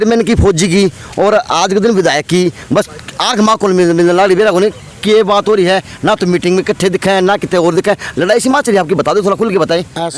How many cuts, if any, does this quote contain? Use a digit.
0